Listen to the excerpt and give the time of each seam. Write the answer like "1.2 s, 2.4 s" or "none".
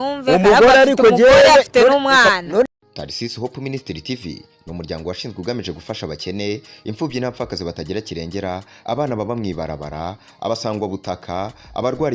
2.7 s